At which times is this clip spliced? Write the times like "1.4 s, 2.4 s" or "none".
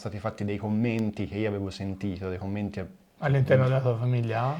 none